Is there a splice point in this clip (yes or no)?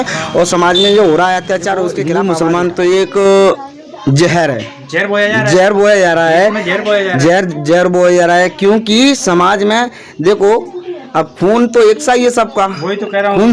yes